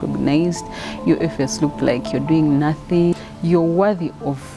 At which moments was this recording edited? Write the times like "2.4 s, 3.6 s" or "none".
3.1 s